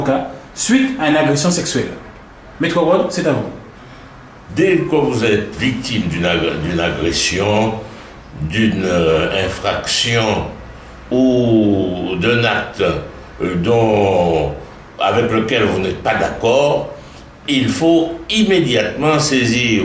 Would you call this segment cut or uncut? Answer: uncut